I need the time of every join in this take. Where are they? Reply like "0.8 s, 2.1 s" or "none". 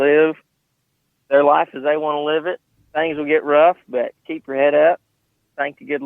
2.7 s